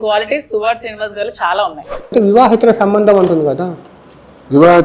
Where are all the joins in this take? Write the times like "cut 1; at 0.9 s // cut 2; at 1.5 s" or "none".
cut 1; at 2.1 s